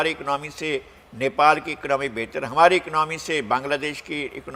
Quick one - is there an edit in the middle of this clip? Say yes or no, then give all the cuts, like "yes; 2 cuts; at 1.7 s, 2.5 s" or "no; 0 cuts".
no; 0 cuts